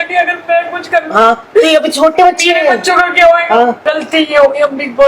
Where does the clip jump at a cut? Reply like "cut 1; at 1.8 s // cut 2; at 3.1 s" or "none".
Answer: cut 1; at 3.8 s